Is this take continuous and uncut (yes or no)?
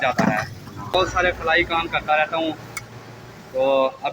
no